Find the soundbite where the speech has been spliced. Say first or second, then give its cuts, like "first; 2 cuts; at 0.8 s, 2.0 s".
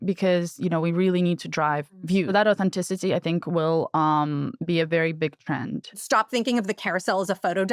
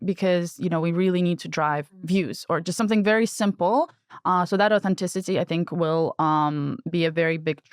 first; 2 cuts; at 2.3 s, 6.0 s